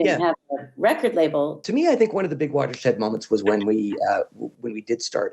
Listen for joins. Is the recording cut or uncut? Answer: cut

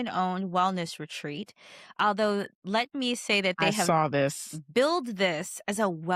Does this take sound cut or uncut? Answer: uncut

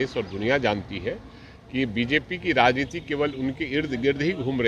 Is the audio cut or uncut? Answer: uncut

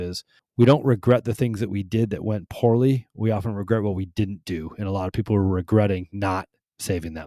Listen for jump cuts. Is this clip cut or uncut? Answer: uncut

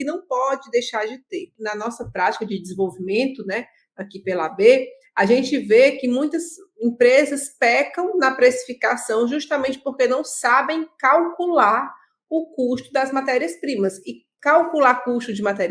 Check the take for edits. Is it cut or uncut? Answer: cut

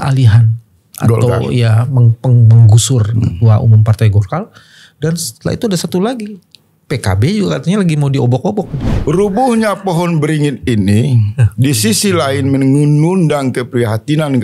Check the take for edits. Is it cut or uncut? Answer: cut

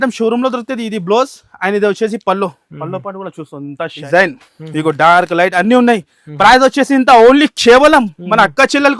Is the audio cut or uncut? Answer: cut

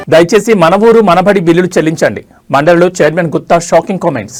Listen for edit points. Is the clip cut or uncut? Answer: uncut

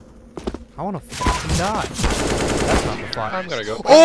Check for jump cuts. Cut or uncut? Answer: uncut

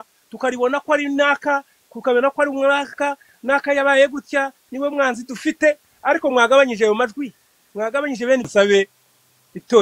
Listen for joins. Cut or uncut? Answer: cut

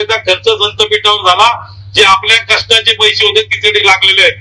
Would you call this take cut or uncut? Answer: uncut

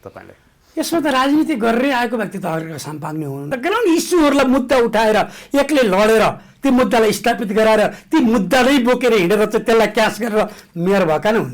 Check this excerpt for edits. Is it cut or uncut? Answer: cut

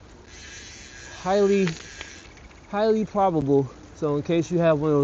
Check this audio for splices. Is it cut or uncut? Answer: cut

